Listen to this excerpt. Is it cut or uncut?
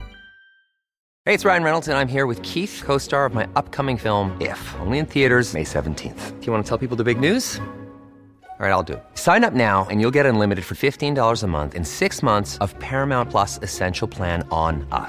cut